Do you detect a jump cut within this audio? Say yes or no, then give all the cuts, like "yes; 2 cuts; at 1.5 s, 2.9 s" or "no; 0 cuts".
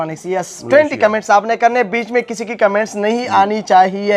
no; 0 cuts